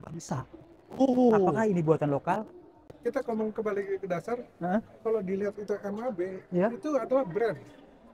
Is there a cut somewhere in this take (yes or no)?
yes